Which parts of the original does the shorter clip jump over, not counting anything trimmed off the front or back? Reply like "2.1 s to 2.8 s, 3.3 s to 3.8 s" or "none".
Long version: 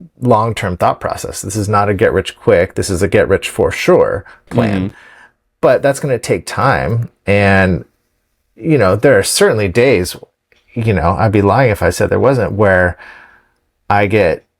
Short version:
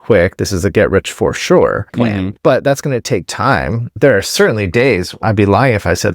4.3 s to 5.1 s, 7.2 s to 9.0 s, 10.2 s to 11.2 s